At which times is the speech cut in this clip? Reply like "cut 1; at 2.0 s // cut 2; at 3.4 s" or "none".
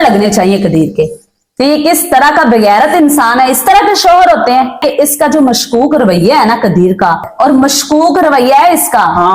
cut 1; at 4.8 s // cut 2; at 7.3 s